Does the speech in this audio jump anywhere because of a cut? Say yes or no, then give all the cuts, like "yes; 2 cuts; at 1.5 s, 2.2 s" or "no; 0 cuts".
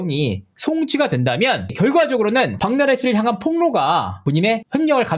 yes; 2 cuts; at 2.6 s, 4.2 s